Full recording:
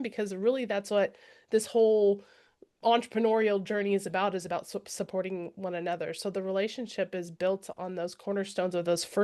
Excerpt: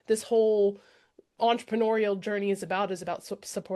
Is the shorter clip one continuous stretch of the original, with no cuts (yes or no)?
yes